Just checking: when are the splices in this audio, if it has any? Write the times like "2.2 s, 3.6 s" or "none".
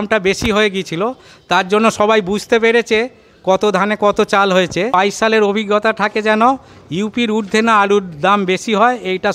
4.9 s